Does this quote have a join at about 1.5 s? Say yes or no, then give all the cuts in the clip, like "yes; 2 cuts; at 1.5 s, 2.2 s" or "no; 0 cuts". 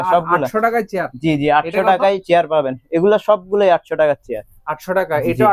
no; 0 cuts